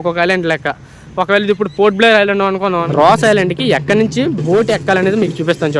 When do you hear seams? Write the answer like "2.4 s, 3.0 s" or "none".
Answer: 2.9 s